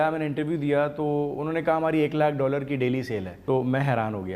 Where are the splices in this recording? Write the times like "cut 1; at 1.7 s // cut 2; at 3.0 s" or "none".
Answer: cut 1; at 3.3 s

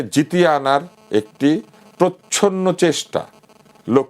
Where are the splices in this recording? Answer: none

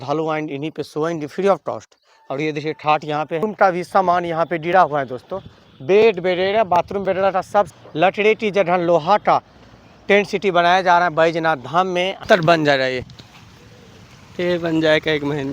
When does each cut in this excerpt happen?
cut 1; at 3.4 s // cut 2; at 7.7 s // cut 3; at 12.2 s

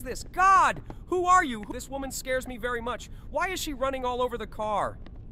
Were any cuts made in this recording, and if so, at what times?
none

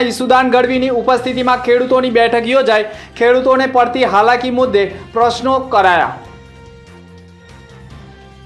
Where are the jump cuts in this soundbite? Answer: none

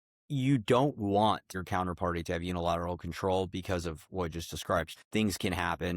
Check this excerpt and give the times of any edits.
cut 1; at 1.5 s // cut 2; at 4.9 s

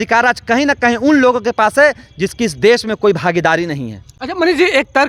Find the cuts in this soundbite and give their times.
none

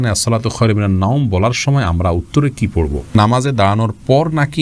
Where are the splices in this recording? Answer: cut 1; at 3.1 s

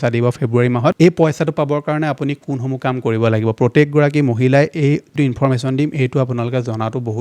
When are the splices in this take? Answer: cut 1; at 0.9 s

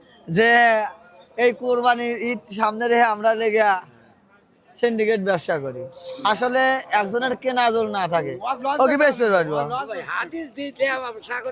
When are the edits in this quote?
none

